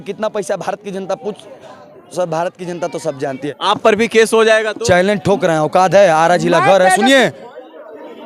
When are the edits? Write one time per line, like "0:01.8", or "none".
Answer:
0:03.5